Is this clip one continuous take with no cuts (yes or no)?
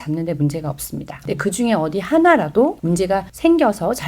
no